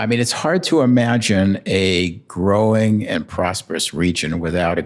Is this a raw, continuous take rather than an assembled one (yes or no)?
yes